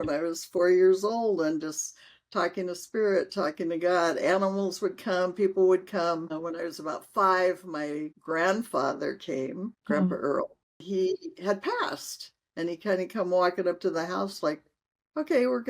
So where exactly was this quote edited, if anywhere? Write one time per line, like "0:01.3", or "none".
0:10.9